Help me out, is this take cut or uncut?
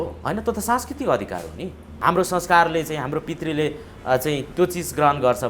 cut